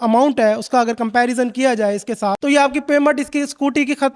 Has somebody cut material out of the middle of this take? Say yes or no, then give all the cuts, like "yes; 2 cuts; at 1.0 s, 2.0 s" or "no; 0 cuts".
yes; 1 cut; at 2.4 s